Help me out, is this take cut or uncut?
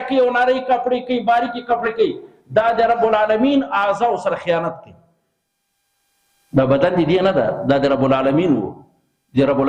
uncut